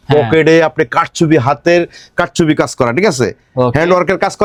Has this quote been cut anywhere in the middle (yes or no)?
no